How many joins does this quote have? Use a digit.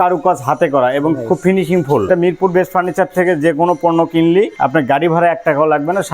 2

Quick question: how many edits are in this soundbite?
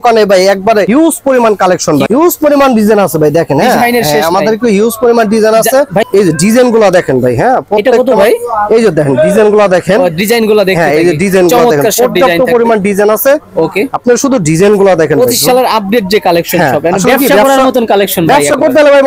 3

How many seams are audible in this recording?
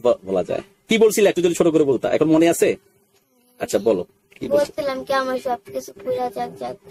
0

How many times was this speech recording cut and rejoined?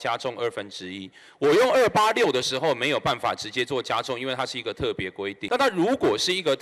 1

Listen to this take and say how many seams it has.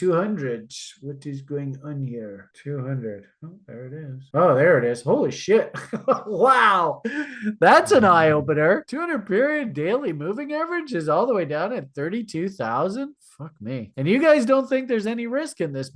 1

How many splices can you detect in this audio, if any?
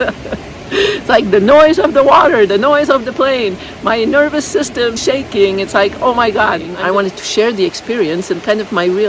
2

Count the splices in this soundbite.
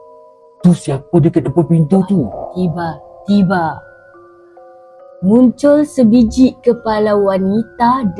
1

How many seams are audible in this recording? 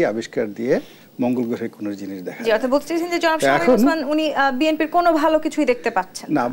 0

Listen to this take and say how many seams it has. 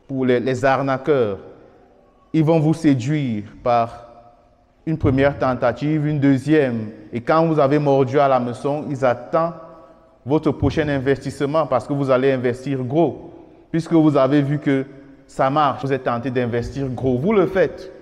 1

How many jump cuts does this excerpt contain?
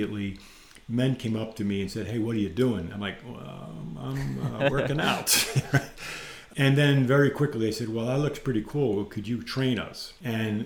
1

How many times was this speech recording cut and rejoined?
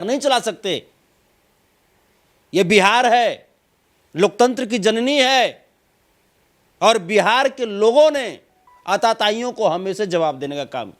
0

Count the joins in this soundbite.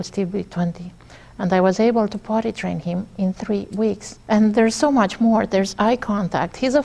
1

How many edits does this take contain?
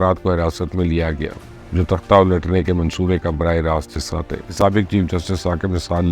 1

